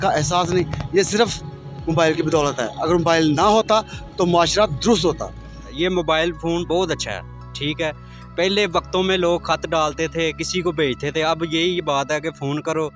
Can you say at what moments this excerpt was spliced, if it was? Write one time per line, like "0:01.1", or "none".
0:05.7